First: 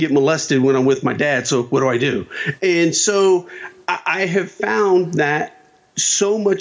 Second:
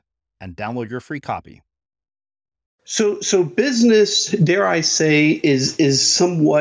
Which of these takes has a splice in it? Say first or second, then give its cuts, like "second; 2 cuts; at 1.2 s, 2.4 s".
second; 1 cut; at 2.8 s